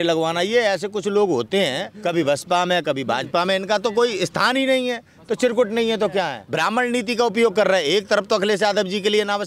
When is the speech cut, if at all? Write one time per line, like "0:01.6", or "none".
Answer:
0:01.9
0:06.4

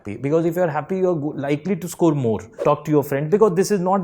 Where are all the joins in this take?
0:02.5

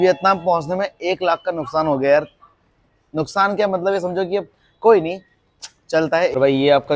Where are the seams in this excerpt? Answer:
none

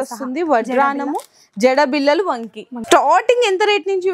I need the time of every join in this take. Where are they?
0:02.8

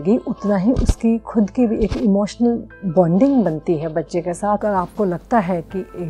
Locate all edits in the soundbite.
0:04.6

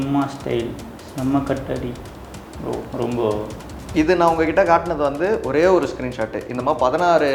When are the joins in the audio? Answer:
0:03.9

